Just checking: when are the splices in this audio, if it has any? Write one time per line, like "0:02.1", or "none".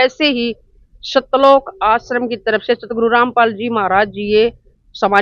none